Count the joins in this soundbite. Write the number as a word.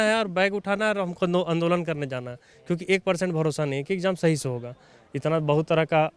zero